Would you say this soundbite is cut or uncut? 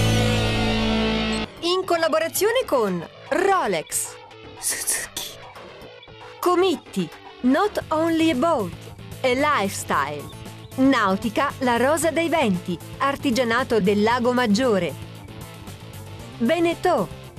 cut